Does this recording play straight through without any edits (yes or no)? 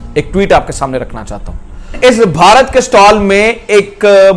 no